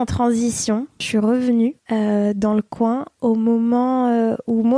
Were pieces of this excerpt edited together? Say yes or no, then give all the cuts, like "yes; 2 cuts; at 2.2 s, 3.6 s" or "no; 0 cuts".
yes; 2 cuts; at 1.0 s, 1.8 s